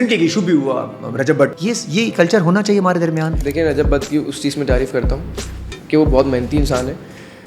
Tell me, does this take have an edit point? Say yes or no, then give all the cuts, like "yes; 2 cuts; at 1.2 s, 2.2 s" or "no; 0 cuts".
yes; 1 cut; at 3.4 s